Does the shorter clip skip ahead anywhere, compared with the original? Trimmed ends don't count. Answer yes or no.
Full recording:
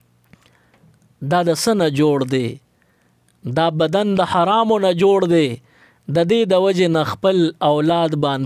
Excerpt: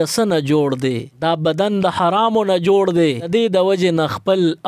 yes